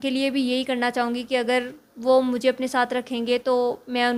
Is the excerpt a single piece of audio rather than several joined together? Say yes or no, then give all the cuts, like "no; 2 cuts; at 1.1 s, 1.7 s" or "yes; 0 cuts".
yes; 0 cuts